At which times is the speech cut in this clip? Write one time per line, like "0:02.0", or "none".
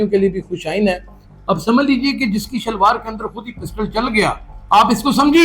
0:04.5